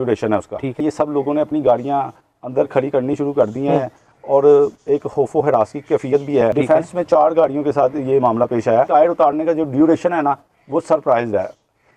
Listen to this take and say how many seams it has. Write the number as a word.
three